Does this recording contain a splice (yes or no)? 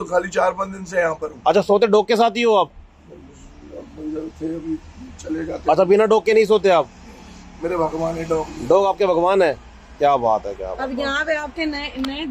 no